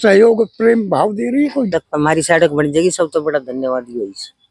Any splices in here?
yes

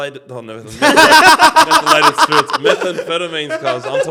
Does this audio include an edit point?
no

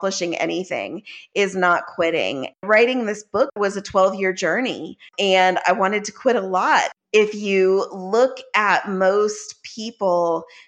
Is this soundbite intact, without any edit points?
no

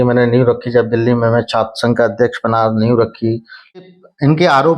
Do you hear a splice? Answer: yes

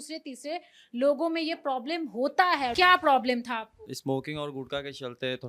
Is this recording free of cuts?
no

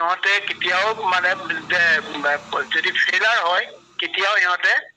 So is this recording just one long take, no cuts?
yes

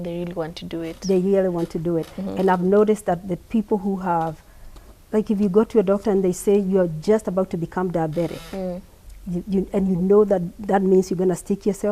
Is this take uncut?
yes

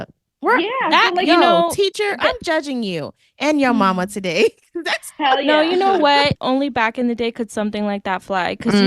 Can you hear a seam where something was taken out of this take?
yes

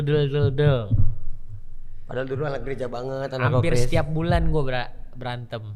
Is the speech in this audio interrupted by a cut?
no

